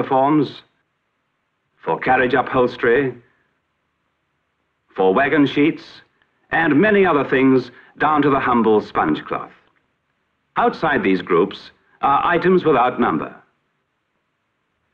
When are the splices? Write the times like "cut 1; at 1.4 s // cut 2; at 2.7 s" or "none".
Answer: none